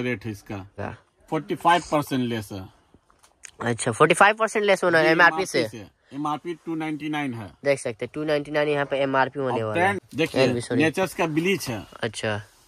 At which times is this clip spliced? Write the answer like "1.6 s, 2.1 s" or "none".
0.7 s, 10.0 s